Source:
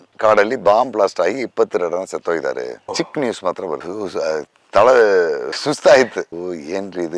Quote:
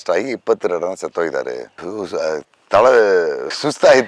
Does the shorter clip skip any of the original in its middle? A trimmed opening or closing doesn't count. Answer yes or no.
yes